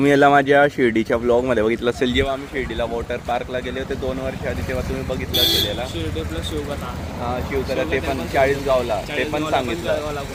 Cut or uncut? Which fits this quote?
uncut